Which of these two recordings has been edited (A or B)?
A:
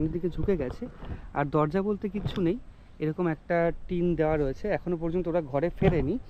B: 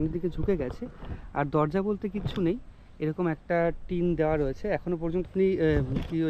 B